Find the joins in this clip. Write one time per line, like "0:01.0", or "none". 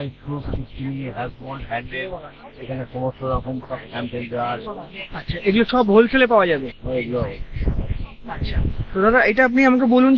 none